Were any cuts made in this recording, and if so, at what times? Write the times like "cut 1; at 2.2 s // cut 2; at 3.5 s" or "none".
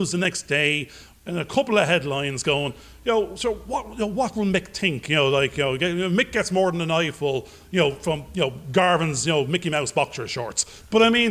none